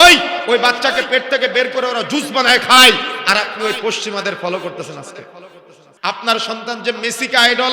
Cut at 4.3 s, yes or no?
no